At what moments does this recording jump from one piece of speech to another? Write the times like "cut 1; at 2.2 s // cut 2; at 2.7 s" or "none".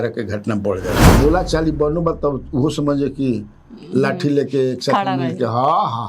cut 1; at 1.0 s